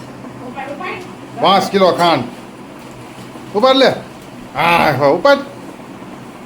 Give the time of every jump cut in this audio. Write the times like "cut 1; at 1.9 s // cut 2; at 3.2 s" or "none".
none